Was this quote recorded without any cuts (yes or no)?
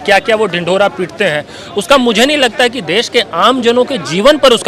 yes